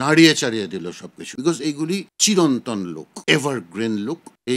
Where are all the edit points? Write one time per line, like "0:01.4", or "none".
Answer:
none

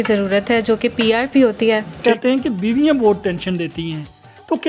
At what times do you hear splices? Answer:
0:02.0

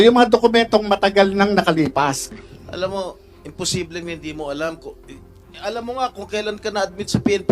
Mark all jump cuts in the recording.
0:02.2

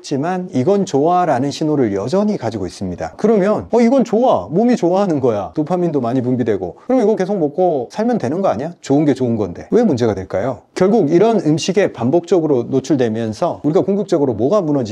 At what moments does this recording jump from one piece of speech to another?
none

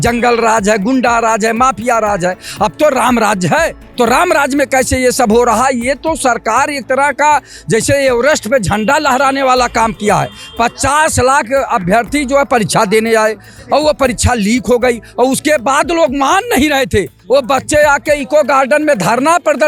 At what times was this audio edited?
none

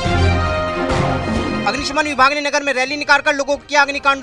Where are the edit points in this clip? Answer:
0:01.5

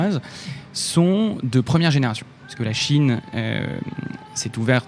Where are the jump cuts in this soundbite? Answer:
none

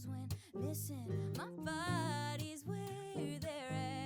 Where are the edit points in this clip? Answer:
none

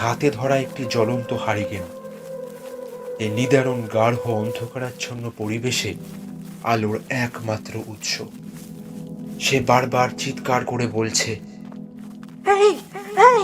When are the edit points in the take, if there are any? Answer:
0:08.3
0:09.4

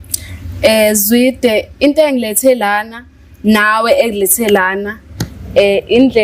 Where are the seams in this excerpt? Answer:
none

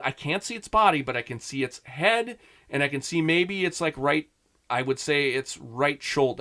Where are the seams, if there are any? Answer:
none

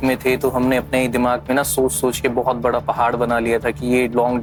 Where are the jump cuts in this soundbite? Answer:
none

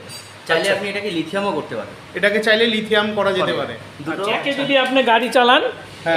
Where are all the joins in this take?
0:04.4

